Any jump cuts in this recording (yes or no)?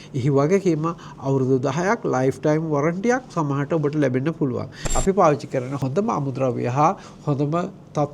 yes